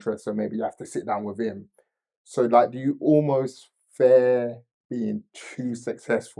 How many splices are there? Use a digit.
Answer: 0